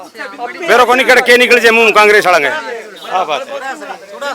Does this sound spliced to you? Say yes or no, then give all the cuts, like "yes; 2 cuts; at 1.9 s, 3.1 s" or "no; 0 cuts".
no; 0 cuts